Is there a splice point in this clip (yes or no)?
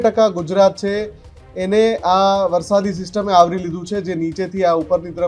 no